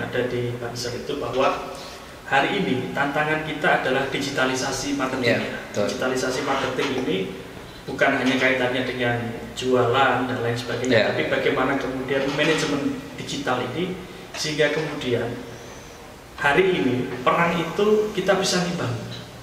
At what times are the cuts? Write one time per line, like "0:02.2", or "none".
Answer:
none